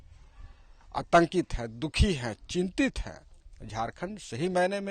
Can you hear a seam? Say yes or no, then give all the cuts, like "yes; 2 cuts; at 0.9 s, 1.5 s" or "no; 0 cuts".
no; 0 cuts